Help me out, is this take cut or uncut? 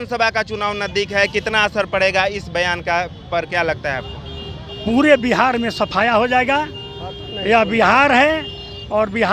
uncut